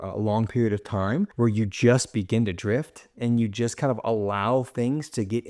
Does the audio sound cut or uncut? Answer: cut